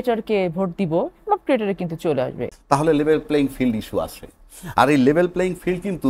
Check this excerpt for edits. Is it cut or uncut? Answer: cut